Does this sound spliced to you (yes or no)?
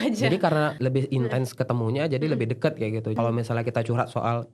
yes